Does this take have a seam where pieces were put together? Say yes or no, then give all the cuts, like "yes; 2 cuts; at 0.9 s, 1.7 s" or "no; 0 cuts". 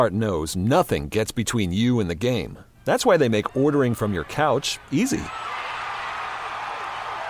no; 0 cuts